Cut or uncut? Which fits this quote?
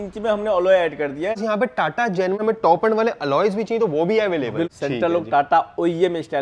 cut